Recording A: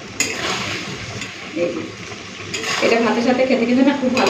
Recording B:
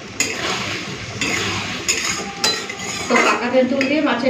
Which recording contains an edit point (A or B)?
A